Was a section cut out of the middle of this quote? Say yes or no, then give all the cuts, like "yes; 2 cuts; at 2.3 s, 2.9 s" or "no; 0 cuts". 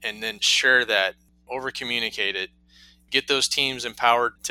yes; 1 cut; at 1.4 s